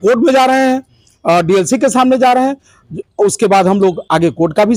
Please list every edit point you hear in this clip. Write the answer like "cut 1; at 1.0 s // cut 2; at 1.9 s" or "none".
none